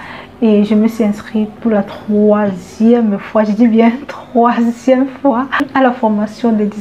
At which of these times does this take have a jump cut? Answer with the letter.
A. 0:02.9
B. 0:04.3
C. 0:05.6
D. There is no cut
C